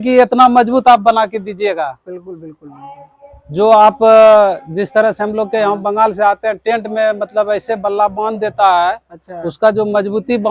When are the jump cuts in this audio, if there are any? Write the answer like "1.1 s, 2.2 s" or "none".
none